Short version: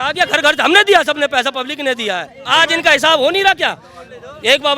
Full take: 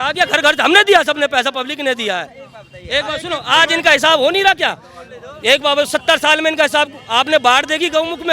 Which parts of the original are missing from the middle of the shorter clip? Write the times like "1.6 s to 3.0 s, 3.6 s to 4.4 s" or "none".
2.4 s to 3.4 s